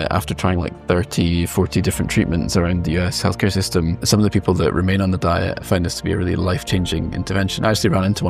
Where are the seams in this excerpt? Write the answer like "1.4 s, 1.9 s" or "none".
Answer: 3.9 s, 5.6 s